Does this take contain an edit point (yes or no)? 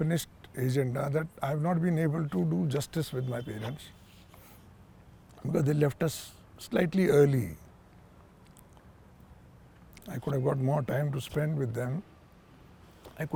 no